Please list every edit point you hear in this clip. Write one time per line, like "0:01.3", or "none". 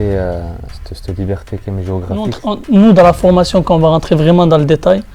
0:02.4